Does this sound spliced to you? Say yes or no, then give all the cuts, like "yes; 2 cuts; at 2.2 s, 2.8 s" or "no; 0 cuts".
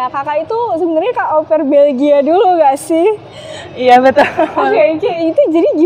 no; 0 cuts